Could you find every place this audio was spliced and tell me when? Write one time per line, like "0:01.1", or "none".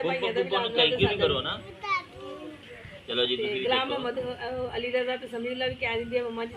none

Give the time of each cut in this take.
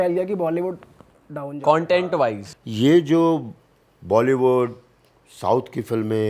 0:02.4

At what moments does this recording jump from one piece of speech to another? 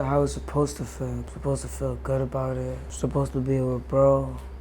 0:01.2
0:02.9

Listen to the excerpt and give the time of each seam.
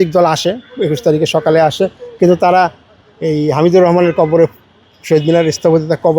none

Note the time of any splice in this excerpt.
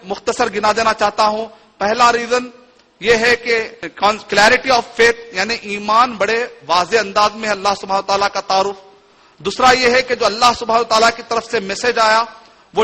0:03.8

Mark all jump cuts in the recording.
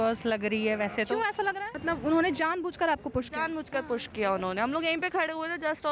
0:01.7

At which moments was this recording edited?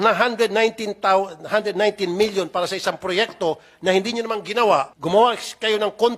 0:04.9

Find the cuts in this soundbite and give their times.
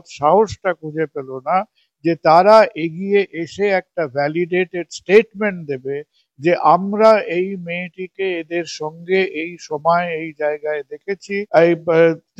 0:11.5

